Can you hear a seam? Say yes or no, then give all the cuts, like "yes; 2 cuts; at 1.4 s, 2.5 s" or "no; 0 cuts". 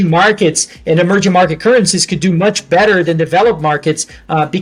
no; 0 cuts